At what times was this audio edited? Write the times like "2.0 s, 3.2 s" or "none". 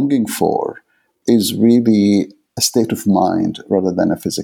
1.1 s, 2.5 s